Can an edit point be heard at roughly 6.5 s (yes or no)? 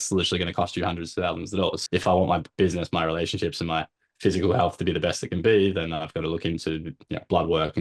no